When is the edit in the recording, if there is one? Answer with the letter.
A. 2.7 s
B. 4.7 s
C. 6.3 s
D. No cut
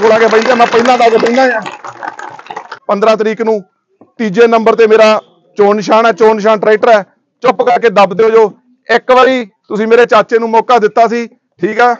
A